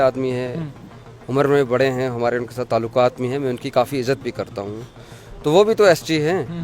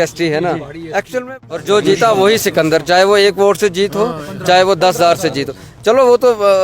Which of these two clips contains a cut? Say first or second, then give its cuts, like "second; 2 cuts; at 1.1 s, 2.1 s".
second; 1 cut; at 1.2 s